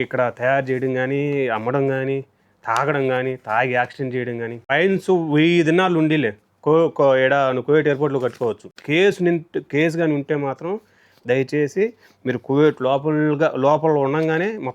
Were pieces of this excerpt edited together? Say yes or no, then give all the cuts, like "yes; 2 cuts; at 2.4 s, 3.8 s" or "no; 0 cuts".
yes; 2 cuts; at 4.6 s, 8.8 s